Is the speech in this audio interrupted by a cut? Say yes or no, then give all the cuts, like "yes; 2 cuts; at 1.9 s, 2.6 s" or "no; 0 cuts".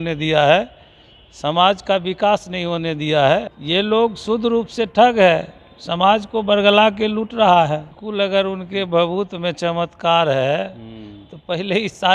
yes; 2 cuts; at 3.5 s, 8.0 s